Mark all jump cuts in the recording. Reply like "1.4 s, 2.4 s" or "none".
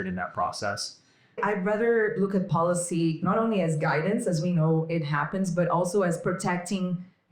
1.3 s